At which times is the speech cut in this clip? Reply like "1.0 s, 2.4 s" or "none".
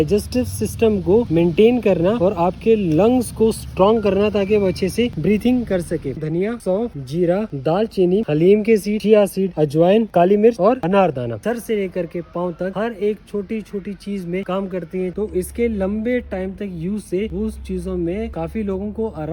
6.2 s, 10.1 s, 11.4 s, 15.1 s, 18.3 s